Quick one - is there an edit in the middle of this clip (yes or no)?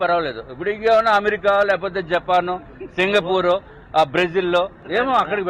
no